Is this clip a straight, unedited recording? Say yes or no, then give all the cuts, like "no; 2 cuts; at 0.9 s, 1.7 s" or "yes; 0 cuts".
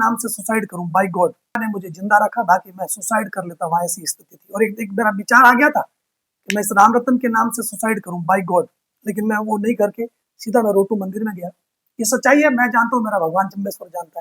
no; 1 cut; at 1.6 s